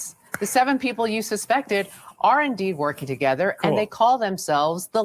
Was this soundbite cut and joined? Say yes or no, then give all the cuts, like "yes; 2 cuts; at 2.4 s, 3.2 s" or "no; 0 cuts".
yes; 1 cut; at 1.1 s